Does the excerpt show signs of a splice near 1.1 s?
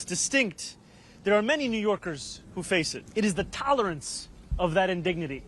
no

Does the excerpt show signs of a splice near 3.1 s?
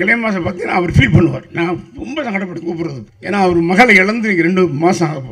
yes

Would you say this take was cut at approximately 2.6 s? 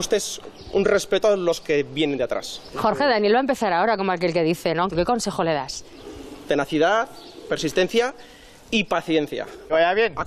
no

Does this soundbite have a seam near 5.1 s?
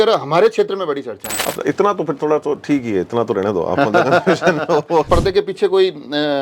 yes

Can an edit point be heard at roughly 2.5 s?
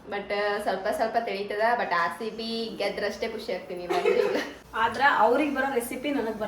no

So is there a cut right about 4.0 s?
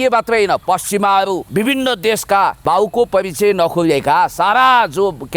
no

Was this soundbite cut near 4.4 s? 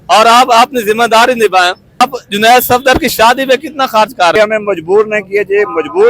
yes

